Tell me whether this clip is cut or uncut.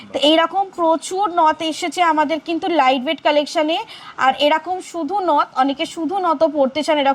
uncut